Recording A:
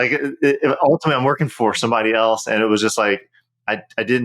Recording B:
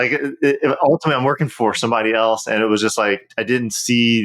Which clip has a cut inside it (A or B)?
B